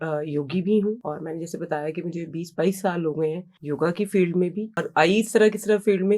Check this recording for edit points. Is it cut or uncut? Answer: cut